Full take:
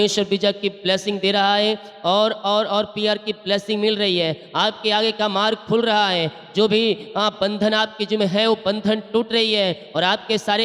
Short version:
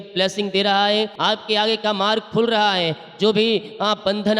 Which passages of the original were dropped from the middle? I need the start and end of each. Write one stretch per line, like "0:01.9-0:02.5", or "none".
0:01.8-0:04.5